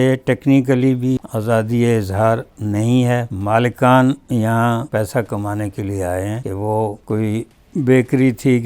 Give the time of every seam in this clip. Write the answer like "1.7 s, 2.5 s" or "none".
1.2 s, 3.3 s, 4.9 s, 6.6 s